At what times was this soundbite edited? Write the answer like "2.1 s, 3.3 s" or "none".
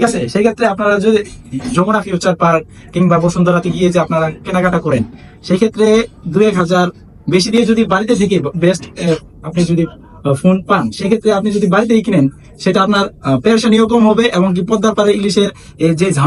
none